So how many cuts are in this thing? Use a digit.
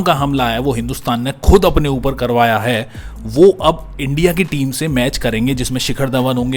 0